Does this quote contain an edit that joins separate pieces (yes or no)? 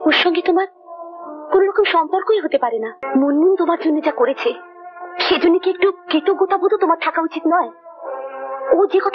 yes